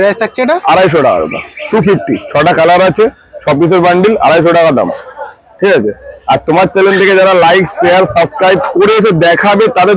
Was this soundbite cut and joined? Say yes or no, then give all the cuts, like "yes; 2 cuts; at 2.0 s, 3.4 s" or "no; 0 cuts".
no; 0 cuts